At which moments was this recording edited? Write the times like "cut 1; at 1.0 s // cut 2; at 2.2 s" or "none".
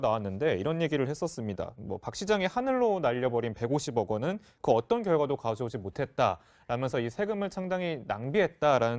cut 1; at 3.5 s